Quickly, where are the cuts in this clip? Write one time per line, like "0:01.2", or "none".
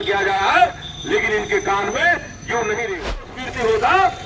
0:03.1